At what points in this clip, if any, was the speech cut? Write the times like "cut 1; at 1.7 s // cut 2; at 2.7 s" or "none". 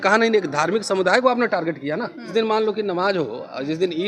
cut 1; at 2.3 s